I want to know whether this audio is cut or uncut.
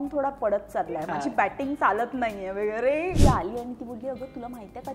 cut